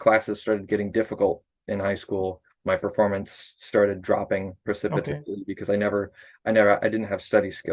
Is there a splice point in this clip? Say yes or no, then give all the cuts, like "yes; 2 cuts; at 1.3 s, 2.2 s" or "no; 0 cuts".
no; 0 cuts